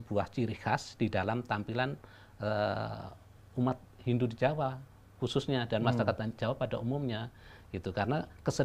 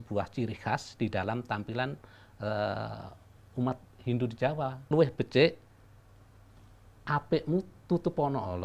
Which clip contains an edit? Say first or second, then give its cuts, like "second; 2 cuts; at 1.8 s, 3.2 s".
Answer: second; 1 cut; at 4.8 s